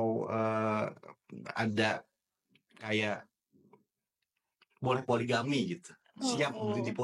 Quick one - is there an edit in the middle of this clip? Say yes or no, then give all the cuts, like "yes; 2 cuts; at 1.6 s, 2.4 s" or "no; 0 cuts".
no; 0 cuts